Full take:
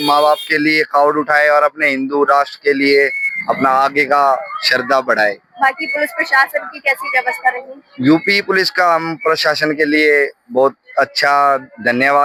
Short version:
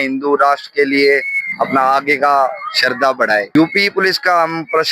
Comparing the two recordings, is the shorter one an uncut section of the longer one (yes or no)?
no